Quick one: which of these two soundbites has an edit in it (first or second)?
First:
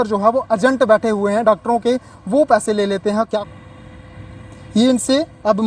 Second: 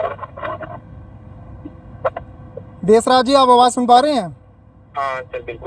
first